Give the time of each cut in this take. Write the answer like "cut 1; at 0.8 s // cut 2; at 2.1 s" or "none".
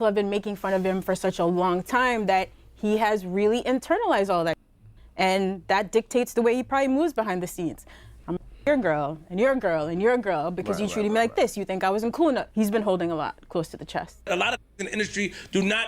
cut 1; at 14.3 s